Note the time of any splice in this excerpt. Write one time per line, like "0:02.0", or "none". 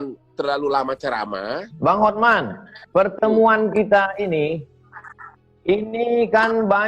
0:01.7